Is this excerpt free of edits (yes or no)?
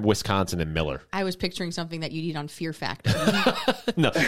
yes